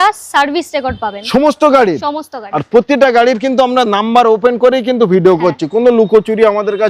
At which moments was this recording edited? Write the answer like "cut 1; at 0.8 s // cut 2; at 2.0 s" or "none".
none